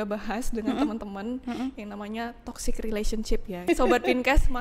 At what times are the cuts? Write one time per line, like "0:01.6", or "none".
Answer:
0:03.6